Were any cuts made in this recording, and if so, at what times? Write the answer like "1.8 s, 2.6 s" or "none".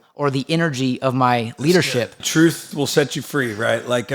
2.2 s